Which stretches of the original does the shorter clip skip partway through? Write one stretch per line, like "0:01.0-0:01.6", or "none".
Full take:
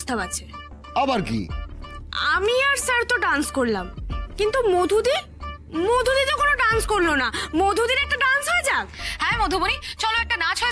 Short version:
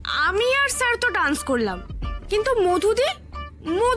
none